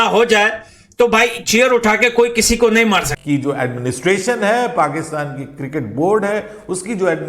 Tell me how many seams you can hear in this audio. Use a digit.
1